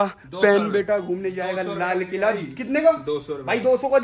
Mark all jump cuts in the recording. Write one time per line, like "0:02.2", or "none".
none